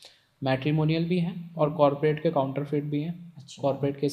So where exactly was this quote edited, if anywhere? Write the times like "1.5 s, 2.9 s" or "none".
none